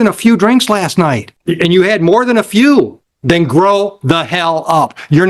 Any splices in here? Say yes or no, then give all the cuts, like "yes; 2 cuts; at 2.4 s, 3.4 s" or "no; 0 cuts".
yes; 2 cuts; at 1.3 s, 3.1 s